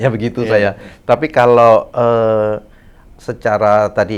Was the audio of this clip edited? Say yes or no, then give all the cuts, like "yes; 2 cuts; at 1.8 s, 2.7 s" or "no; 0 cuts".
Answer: no; 0 cuts